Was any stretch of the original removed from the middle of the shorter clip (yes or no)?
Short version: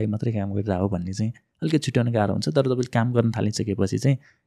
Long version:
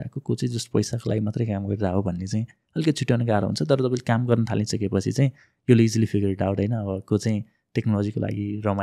no